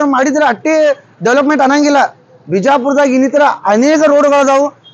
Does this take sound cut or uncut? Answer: uncut